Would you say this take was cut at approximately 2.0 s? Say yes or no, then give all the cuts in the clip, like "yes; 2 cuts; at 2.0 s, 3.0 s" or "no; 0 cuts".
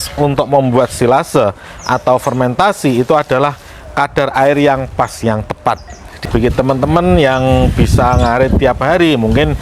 no; 1 cut; at 6.2 s